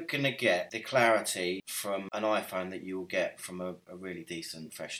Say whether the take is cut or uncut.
cut